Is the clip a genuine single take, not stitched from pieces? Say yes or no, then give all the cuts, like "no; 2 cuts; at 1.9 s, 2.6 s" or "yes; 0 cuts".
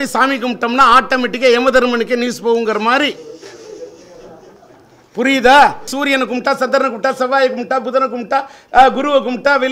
no; 1 cut; at 5.9 s